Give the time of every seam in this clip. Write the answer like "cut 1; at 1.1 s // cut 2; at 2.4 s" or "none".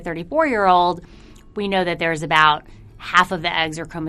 none